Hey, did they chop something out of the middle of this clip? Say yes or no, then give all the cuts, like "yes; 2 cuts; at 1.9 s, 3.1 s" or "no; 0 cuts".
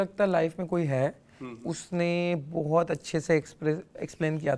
no; 0 cuts